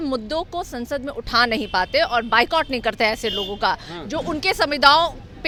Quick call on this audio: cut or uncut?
uncut